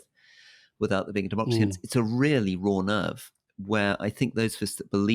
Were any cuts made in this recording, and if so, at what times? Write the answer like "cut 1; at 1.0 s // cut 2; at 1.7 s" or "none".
cut 1; at 1.7 s